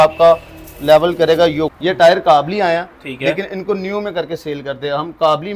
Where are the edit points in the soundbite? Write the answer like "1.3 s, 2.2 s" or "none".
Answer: 1.7 s